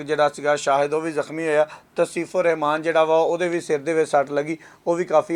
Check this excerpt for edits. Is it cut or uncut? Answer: uncut